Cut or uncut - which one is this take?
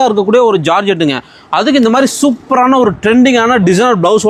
uncut